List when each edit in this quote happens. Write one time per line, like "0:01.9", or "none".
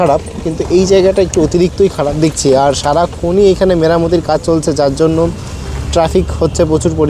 none